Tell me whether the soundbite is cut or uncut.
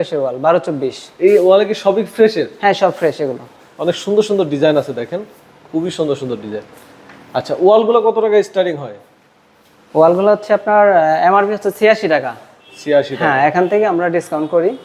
uncut